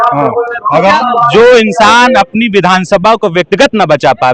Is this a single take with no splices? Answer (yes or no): no